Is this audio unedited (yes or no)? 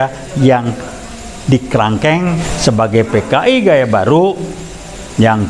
no